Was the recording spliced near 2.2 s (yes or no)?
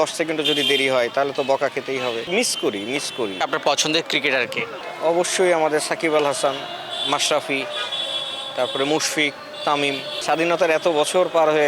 yes